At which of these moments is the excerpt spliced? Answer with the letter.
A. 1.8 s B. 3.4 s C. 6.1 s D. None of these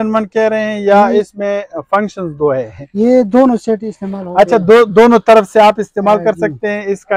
D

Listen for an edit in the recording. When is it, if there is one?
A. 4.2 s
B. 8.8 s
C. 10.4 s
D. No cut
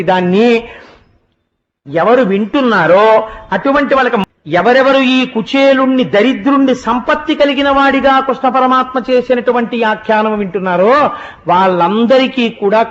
A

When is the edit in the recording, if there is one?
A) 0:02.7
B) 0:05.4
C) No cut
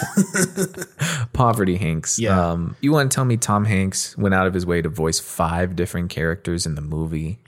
A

